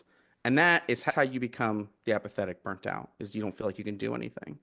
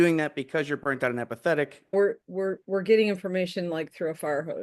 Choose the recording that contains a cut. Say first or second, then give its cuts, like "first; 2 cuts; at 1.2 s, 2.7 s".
second; 1 cut; at 1.9 s